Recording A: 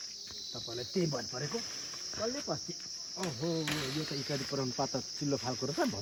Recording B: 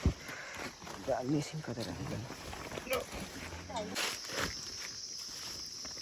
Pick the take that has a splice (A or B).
B